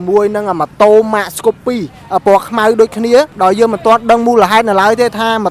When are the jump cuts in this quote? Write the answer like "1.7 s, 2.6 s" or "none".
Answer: 3.3 s